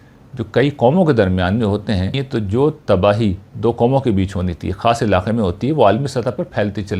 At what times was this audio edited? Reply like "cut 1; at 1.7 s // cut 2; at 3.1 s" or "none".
cut 1; at 2.2 s